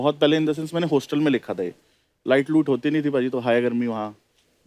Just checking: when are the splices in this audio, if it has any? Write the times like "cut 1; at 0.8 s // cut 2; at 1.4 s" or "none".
none